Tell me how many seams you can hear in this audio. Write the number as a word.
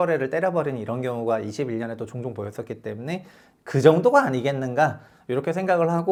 zero